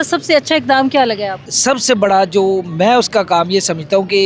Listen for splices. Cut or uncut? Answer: cut